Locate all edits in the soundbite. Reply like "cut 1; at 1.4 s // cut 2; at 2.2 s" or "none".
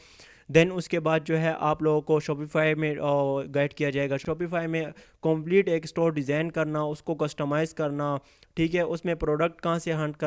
cut 1; at 4.2 s